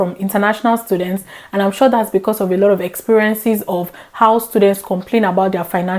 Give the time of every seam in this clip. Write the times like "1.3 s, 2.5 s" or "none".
none